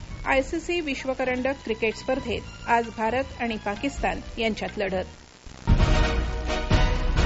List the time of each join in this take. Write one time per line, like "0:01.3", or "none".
0:05.5